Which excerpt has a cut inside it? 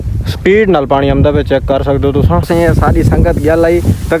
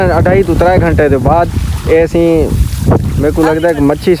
first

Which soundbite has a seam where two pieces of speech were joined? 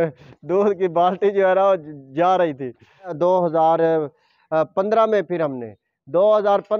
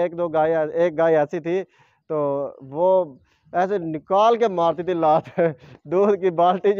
first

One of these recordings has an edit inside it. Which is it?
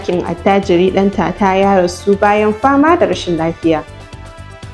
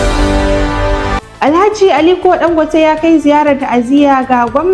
second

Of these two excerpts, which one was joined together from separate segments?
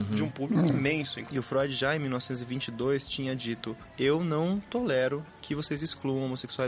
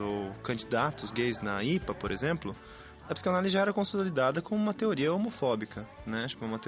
first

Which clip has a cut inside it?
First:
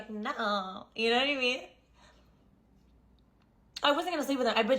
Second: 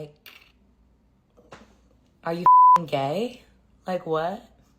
first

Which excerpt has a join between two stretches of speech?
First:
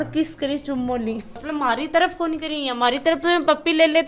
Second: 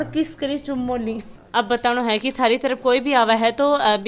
first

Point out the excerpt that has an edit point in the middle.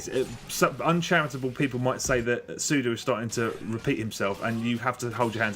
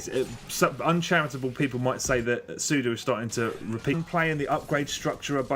first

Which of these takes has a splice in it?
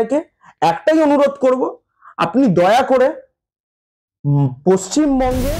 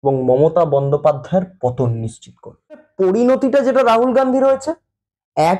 second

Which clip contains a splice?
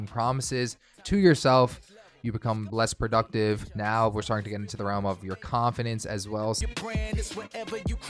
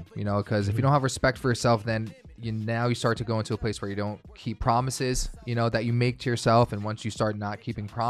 first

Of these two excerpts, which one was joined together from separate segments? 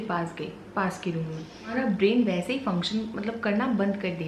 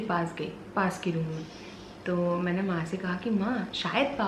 first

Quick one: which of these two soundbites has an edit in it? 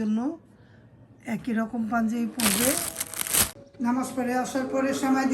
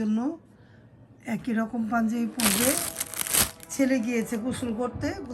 first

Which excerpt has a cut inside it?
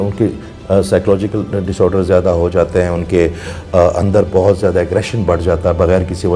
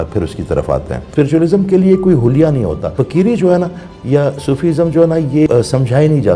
second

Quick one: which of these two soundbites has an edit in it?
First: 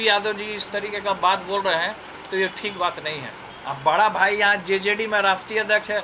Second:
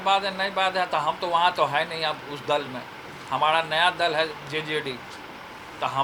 first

